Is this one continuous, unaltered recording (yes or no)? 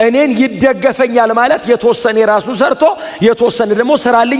yes